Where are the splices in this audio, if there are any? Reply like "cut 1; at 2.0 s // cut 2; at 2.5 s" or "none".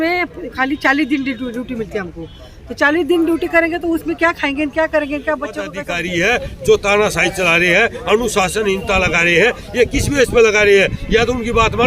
cut 1; at 5.9 s